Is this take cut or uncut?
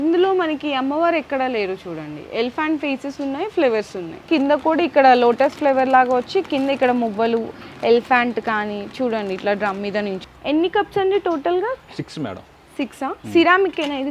cut